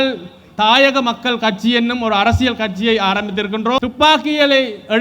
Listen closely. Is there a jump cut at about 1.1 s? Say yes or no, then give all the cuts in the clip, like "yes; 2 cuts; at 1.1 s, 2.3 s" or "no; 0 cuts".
no; 1 cut; at 3.8 s